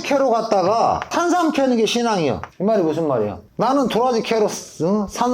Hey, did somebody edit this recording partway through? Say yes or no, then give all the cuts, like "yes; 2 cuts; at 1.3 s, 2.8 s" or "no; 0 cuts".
yes; 3 cuts; at 1.1 s, 2.5 s, 3.4 s